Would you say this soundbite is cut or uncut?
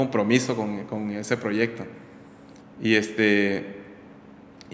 uncut